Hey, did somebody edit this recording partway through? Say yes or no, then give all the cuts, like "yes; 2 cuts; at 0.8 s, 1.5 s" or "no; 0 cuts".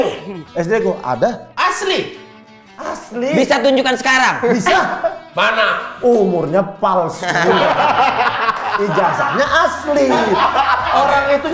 no; 0 cuts